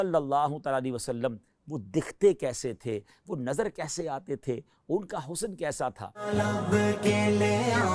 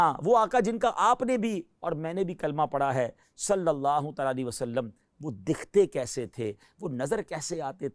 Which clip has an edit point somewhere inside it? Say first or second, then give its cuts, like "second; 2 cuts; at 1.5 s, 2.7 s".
first; 1 cut; at 6.3 s